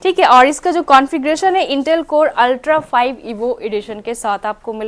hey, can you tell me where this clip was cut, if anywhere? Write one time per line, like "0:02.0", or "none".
none